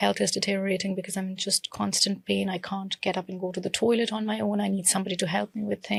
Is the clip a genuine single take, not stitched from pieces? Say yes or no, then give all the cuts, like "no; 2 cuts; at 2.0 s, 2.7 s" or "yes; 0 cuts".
yes; 0 cuts